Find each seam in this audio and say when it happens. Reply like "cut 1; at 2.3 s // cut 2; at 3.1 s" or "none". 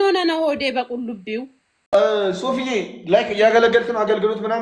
cut 1; at 1.9 s